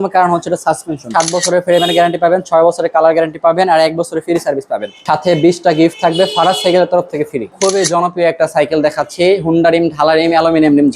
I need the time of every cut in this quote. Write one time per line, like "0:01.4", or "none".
0:01.0
0:05.0
0:07.5